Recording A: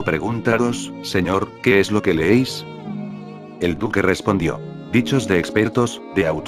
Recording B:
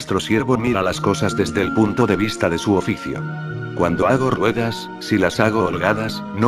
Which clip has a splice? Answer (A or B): B